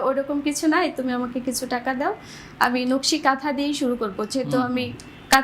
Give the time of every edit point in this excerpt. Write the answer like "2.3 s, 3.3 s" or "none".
none